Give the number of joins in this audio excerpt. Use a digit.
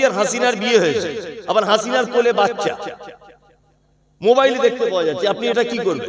0